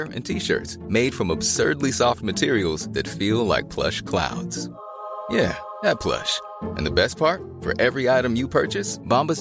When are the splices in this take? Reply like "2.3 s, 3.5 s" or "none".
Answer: none